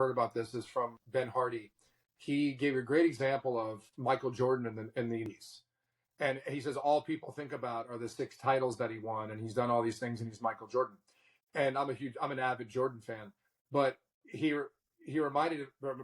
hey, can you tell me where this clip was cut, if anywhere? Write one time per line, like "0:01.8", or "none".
0:01.0
0:05.3